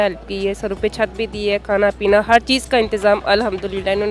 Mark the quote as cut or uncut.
uncut